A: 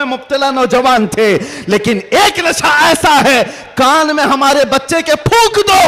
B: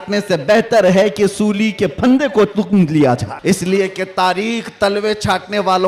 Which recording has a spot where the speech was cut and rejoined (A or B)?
B